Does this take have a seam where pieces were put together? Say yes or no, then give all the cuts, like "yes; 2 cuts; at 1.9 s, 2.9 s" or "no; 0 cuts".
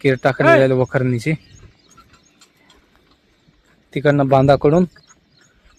no; 0 cuts